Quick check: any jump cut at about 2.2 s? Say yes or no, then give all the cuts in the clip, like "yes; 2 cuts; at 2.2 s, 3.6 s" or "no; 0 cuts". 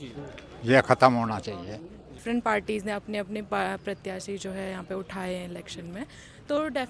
yes; 1 cut; at 2.2 s